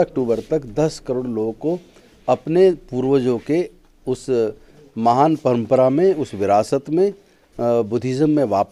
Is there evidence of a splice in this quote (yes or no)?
no